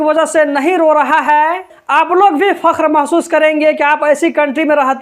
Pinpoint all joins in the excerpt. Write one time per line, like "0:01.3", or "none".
0:01.7